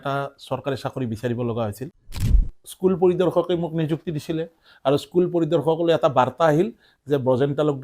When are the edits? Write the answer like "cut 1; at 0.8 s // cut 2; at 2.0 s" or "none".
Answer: cut 1; at 2.4 s